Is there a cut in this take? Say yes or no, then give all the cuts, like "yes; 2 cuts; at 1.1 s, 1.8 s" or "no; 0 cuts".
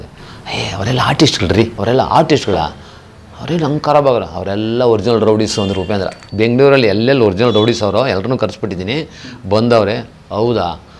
yes; 2 cuts; at 1.7 s, 6.2 s